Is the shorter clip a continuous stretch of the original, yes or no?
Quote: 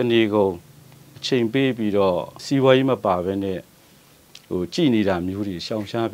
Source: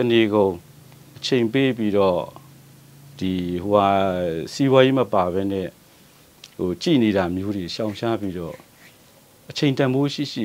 no